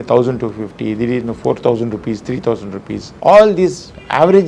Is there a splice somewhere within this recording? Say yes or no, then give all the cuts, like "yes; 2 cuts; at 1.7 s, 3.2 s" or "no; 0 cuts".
yes; 1 cut; at 3.0 s